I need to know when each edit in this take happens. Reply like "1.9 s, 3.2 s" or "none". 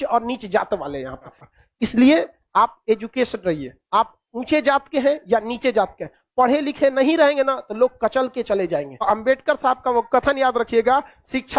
1.4 s, 8.9 s